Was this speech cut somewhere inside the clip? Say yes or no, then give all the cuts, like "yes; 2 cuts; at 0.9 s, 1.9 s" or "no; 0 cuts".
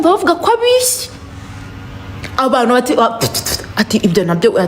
no; 0 cuts